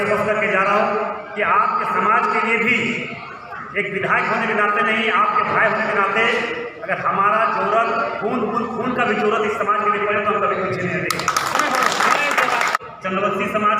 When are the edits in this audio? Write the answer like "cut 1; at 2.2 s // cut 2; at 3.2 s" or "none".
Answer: cut 1; at 12.8 s

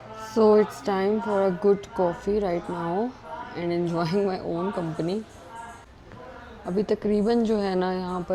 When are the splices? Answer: cut 1; at 6.0 s

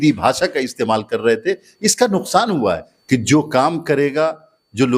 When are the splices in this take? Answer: cut 1; at 2.9 s

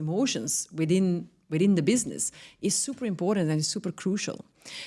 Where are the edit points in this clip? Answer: none

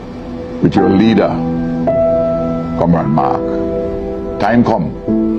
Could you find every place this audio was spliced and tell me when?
none

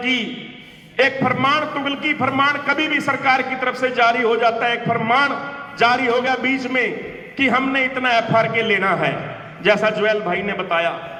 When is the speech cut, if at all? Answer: none

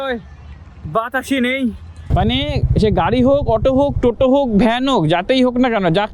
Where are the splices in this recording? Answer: cut 1; at 1.9 s

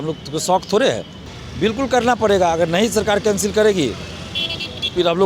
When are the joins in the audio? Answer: cut 1; at 1.2 s

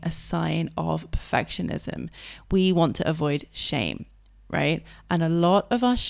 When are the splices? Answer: none

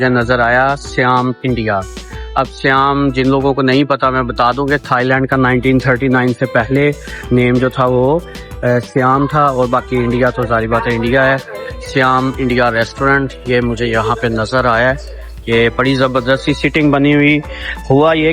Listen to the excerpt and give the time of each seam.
none

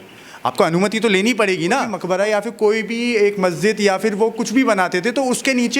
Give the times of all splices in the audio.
cut 1; at 2.0 s

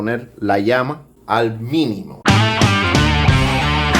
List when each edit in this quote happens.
cut 1; at 1.1 s // cut 2; at 2.1 s

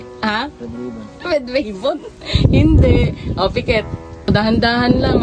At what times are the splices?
cut 1; at 4.3 s

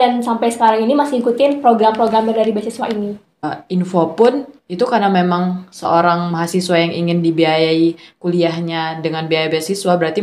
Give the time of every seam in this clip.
cut 1; at 3.4 s

